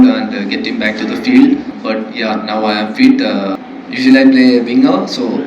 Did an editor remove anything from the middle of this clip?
yes; 2 cuts; at 1.8 s, 3.6 s

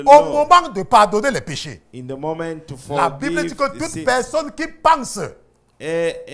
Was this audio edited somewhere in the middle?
no; 0 cuts

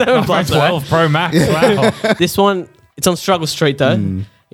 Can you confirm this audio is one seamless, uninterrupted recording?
no; 1 cut; at 2.2 s

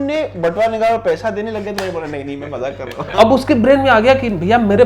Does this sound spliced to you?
yes; 1 cut; at 3.0 s

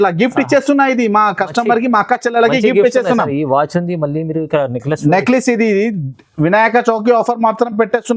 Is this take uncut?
yes; 0 cuts

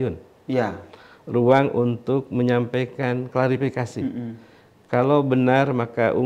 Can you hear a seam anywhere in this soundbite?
no; 0 cuts

